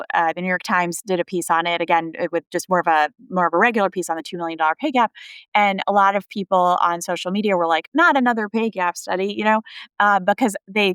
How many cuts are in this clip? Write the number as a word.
zero